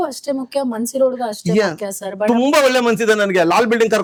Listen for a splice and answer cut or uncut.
uncut